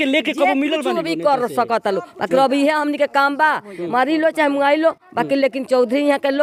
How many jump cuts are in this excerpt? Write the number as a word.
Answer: zero